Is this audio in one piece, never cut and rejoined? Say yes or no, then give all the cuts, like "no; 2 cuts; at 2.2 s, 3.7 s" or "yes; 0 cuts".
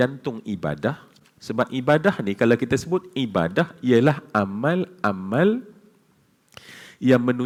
yes; 0 cuts